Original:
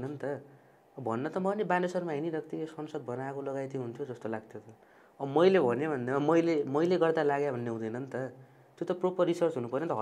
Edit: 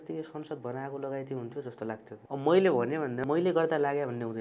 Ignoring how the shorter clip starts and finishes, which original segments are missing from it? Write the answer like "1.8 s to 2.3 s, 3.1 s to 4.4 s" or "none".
4.6 s to 5.0 s, 6.1 s to 6.7 s